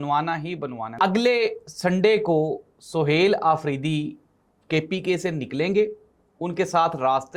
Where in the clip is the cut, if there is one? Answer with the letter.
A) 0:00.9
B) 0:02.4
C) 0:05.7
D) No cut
A